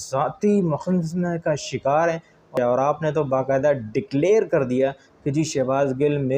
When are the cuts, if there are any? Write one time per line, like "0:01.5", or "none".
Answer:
0:02.5